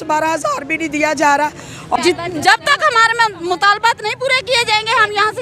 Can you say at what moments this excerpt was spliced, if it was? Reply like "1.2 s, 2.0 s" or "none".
2.0 s